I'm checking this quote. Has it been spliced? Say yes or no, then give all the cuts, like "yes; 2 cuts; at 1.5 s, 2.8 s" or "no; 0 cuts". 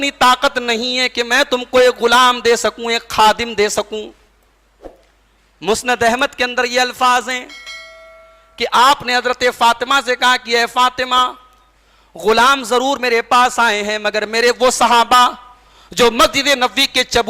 no; 0 cuts